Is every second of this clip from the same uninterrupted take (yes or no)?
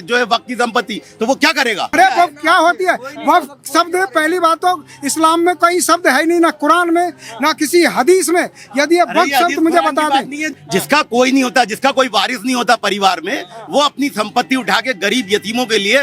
no